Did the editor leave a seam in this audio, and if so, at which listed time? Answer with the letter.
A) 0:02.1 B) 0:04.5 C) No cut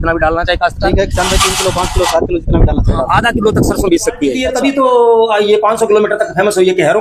B